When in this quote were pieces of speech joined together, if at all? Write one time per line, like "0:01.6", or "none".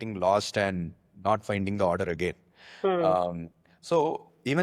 none

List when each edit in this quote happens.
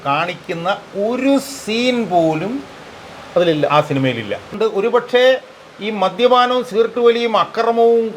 0:04.5

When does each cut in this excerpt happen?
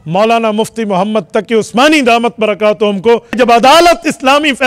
0:03.4

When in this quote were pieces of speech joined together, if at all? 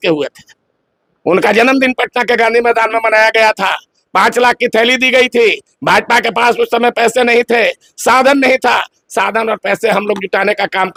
none

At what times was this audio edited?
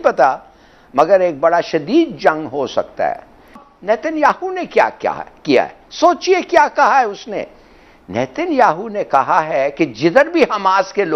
0:03.6

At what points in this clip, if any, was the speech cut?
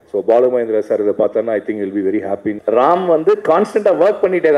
0:02.5

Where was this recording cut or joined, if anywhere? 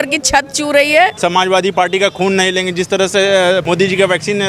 0:01.2
0:03.6

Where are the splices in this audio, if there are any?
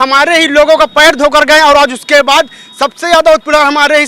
none

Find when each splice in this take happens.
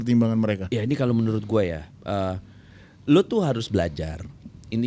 none

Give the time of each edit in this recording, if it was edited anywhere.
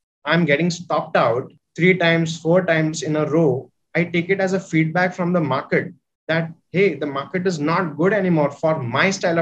0:01.6

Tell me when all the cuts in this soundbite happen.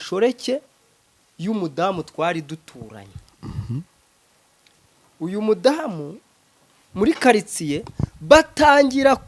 none

